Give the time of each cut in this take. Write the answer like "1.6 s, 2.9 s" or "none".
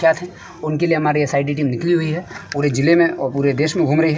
none